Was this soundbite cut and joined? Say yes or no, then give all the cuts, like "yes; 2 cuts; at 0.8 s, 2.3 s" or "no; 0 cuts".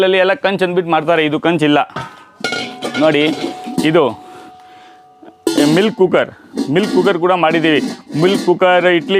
no; 0 cuts